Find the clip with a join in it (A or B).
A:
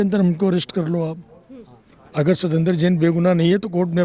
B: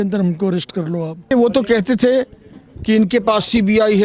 B